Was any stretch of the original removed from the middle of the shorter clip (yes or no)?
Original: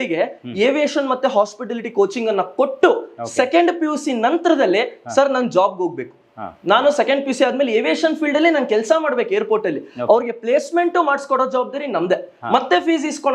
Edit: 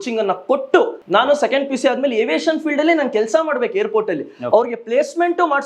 yes